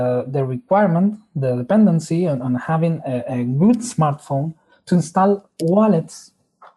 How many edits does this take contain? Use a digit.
1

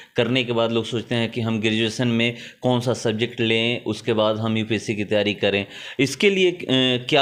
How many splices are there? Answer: 0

